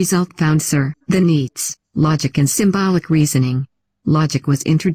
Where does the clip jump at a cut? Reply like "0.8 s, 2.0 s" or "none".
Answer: 1.0 s